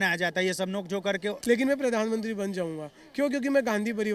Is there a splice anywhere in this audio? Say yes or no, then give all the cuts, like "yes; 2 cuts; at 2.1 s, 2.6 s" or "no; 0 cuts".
yes; 1 cut; at 1.3 s